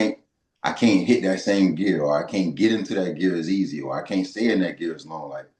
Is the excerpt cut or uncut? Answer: uncut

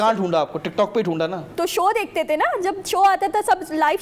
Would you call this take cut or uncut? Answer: uncut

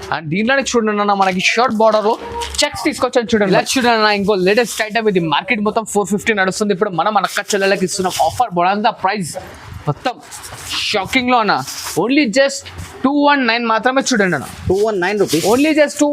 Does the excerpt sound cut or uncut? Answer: cut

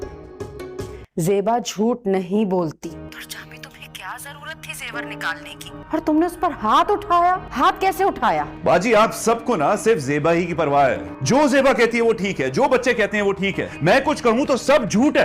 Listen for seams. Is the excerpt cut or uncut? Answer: cut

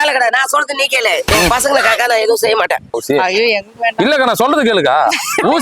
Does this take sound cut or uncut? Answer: cut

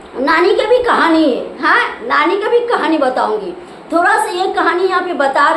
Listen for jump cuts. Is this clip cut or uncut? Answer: uncut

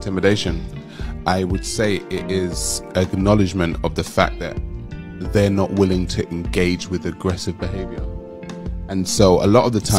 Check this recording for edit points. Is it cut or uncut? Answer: uncut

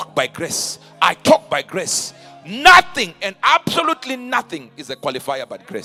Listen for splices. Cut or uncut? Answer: uncut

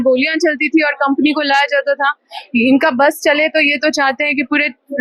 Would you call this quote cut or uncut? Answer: uncut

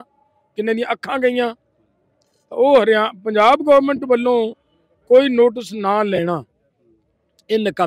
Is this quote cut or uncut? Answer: uncut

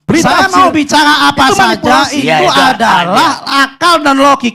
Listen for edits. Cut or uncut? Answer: uncut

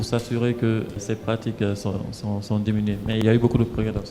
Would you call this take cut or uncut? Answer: cut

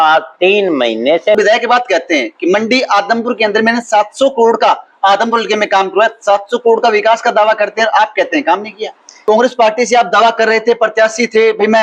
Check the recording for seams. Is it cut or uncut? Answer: cut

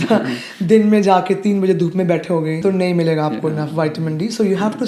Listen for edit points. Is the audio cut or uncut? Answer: cut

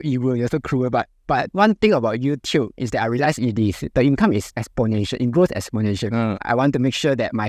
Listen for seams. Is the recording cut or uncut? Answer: cut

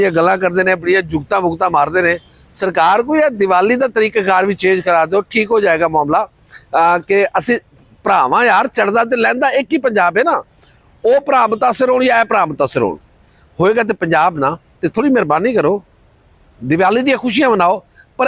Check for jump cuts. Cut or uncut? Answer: uncut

